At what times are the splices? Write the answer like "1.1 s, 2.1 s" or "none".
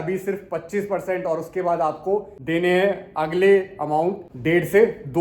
4.2 s